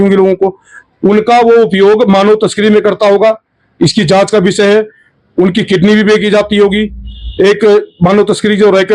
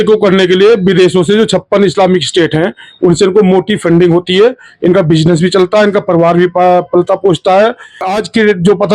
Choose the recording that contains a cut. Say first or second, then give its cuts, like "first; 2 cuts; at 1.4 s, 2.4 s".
second; 1 cut; at 8.0 s